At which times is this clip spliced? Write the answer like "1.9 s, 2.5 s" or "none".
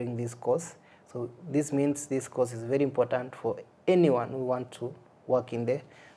none